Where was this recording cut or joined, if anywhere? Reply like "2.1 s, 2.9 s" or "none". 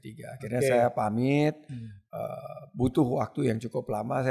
none